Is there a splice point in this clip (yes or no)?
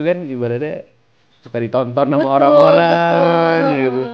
no